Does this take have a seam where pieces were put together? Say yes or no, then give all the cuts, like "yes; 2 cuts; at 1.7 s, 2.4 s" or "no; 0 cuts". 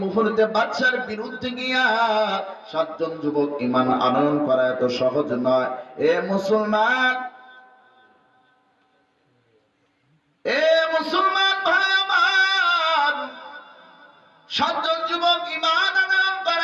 no; 0 cuts